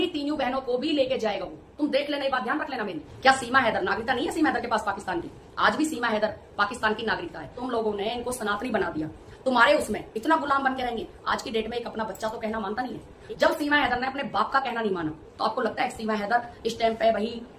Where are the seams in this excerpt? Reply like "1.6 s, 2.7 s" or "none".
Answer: 3.0 s, 7.6 s, 13.1 s, 15.2 s